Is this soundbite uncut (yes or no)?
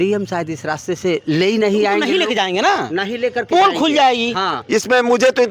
no